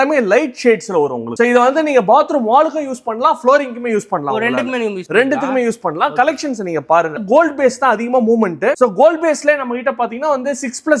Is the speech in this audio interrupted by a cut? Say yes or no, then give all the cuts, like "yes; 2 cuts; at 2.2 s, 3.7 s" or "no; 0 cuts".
no; 0 cuts